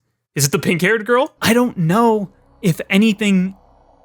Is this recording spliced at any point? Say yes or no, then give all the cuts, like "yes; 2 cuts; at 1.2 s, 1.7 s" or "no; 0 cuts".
yes; 1 cut; at 1.4 s